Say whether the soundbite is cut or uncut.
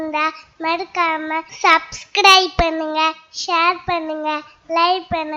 cut